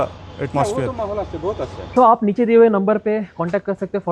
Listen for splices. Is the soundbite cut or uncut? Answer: cut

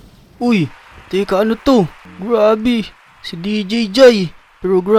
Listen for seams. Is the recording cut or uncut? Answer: uncut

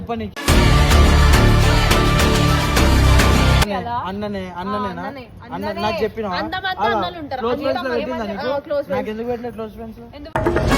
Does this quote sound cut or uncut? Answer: cut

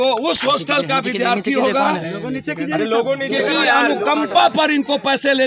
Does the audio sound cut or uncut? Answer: uncut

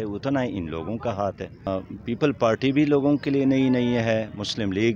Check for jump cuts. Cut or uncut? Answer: cut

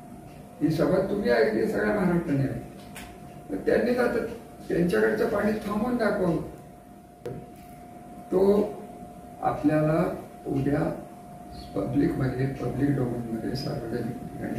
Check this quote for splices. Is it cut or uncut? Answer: cut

